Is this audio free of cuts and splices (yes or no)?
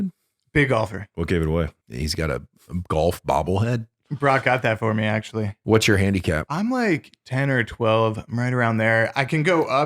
no